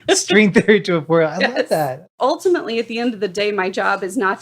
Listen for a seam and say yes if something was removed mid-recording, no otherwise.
yes